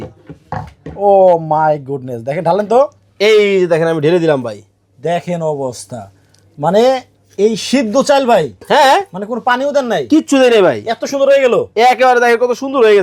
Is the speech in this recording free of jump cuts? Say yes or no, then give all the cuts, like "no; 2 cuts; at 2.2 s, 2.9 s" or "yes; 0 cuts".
yes; 0 cuts